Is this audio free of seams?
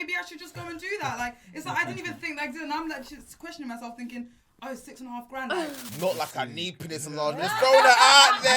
no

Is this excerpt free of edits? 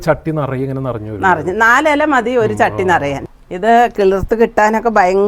no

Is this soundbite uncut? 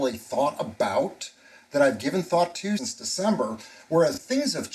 no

